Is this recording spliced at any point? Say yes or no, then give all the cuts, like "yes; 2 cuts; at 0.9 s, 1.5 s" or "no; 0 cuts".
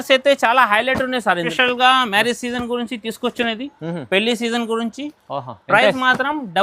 yes; 1 cut; at 1.4 s